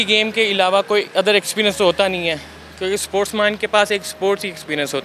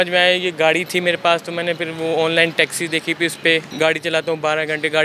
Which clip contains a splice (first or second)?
second